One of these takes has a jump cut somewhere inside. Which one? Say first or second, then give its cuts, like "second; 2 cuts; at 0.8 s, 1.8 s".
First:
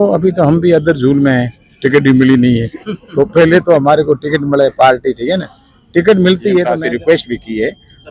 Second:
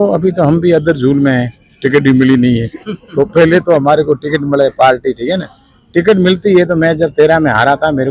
first; 1 cut; at 6.7 s